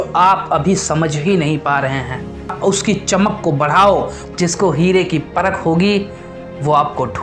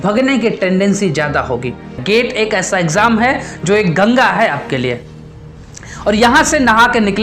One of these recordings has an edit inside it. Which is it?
second; 1 cut; at 2.0 s

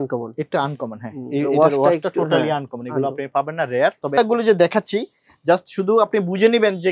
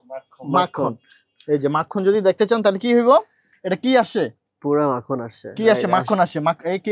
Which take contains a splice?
first; 1 cut; at 4.2 s

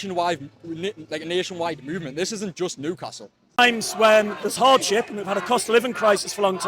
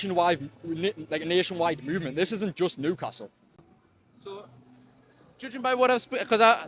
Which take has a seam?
first; 1 cut; at 3.6 s

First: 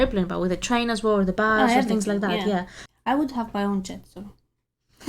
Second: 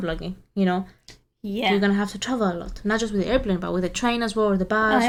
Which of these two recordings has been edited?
first; 1 cut; at 2.8 s

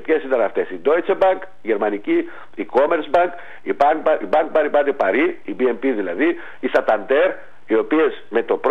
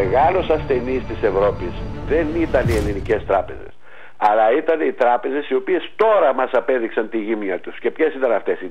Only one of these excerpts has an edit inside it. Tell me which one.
first; 2 cuts; at 5.4 s, 7.5 s

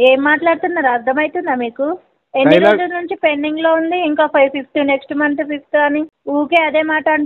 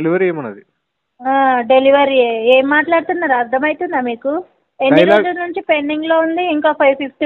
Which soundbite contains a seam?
first; 1 cut; at 6.2 s

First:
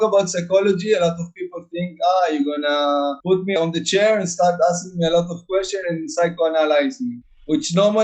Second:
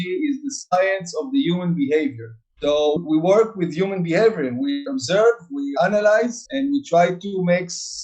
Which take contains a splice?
second; 2 cuts; at 4.9 s, 5.7 s

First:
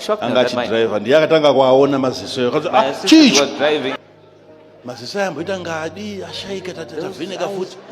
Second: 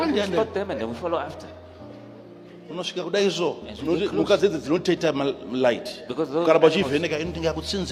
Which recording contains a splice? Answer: first; 1 cut; at 4.0 s

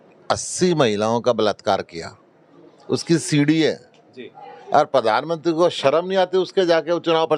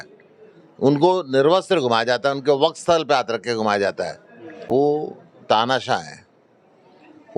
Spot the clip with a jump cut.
second; 1 cut; at 4.7 s

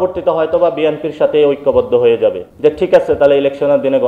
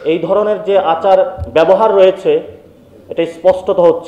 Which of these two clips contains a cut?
first; 1 cut; at 2.5 s

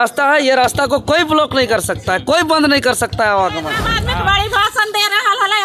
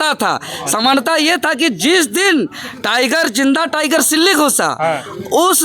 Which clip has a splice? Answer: first; 1 cut; at 3.9 s

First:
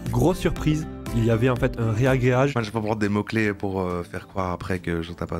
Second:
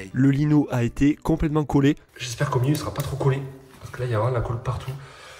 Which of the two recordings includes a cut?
first; 1 cut; at 2.5 s

